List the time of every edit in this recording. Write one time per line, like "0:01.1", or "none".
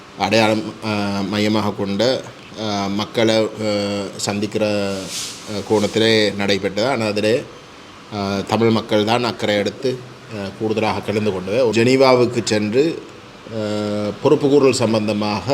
0:11.7